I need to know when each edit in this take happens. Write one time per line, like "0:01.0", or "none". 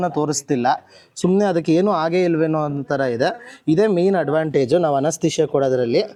none